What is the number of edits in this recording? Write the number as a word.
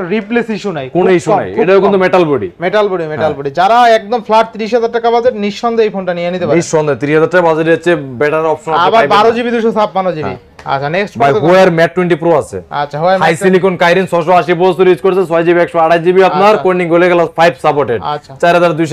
zero